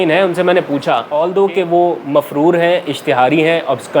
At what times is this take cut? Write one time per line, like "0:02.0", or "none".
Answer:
0:01.1